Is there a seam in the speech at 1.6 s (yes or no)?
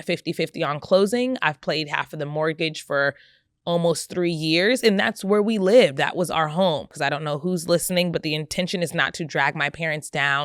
no